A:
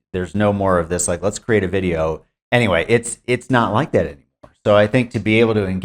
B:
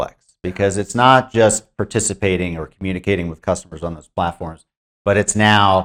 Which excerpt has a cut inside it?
A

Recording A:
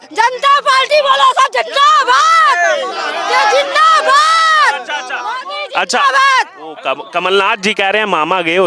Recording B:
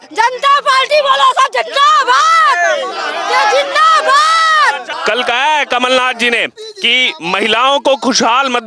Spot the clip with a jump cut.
B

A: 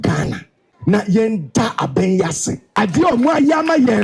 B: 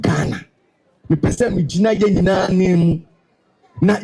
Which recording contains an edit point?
A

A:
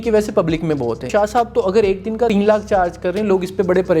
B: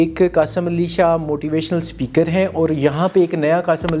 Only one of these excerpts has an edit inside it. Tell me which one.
A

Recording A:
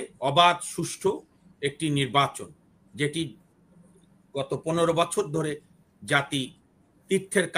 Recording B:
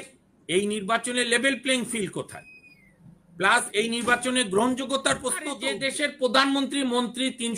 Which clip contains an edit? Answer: B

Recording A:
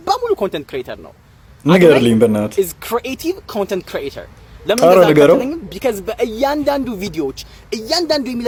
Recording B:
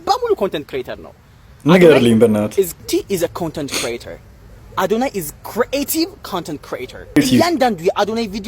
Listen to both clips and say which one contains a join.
B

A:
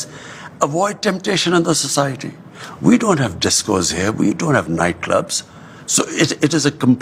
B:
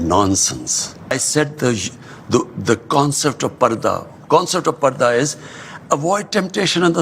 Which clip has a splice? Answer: B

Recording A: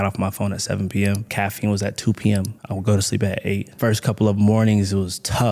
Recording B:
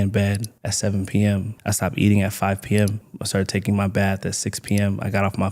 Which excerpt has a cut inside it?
A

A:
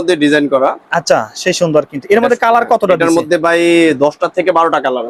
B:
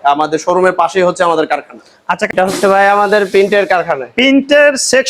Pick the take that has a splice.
B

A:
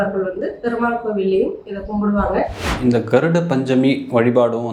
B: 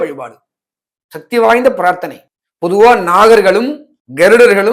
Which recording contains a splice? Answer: A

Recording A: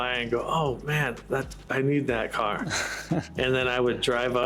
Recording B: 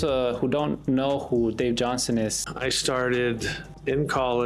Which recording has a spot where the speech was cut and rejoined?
B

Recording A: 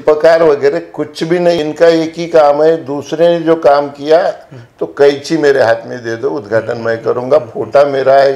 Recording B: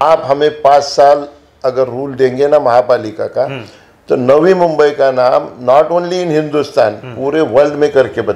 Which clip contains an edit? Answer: A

